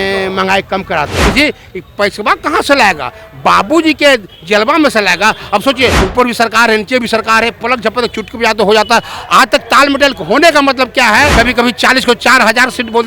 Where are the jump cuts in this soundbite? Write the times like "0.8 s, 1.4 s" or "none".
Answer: 1.2 s, 6.0 s, 11.3 s